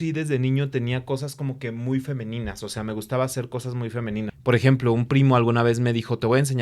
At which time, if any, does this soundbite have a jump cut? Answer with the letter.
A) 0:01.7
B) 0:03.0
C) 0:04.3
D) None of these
C